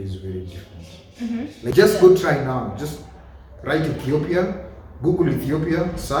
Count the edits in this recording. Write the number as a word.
one